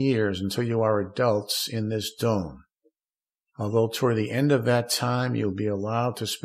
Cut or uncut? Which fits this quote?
uncut